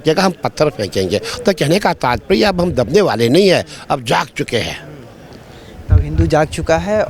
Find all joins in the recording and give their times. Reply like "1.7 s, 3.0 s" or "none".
none